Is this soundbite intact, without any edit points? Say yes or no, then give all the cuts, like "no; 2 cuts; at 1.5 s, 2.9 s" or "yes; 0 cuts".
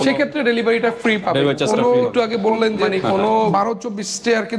no; 1 cut; at 3.5 s